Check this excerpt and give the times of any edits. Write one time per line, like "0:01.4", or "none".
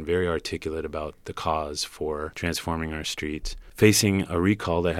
0:02.3
0:03.6